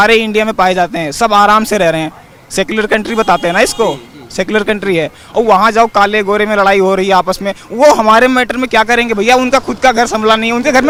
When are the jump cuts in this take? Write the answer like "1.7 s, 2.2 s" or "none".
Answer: none